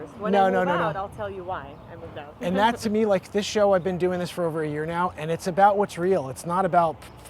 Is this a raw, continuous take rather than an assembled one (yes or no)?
yes